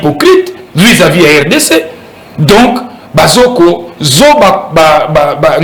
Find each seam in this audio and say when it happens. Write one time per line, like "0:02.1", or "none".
none